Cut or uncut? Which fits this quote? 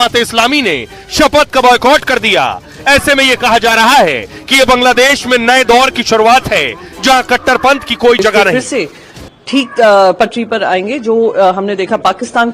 cut